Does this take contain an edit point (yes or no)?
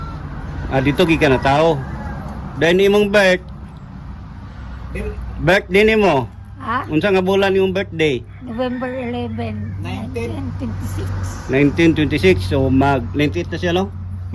no